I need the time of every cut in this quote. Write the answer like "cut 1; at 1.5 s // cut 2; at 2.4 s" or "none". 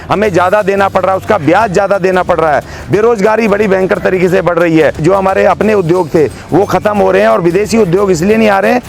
cut 1; at 5.0 s